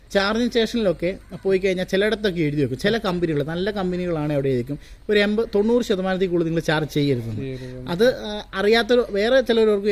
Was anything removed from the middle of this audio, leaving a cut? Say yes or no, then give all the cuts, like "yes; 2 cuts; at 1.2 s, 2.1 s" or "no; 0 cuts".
no; 0 cuts